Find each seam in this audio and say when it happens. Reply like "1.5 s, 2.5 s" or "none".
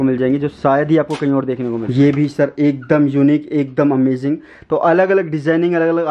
1.8 s